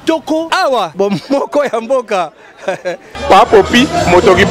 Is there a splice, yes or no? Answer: yes